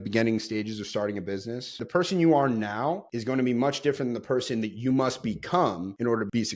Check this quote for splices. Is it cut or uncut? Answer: cut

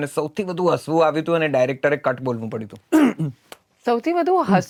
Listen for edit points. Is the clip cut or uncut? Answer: uncut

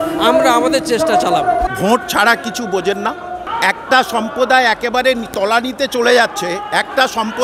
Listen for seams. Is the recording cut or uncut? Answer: cut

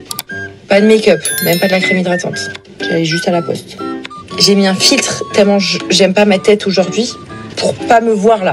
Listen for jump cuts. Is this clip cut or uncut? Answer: cut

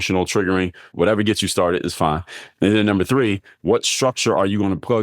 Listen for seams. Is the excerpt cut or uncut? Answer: cut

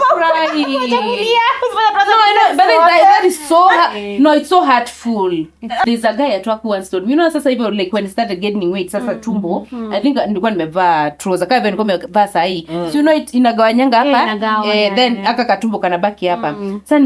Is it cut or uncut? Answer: cut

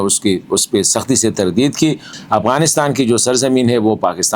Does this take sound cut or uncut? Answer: cut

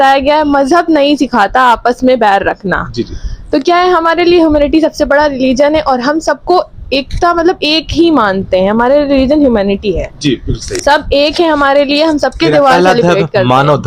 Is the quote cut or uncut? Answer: uncut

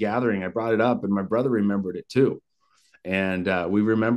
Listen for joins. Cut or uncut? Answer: uncut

